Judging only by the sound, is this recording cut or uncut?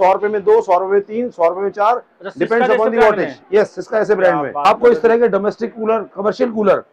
cut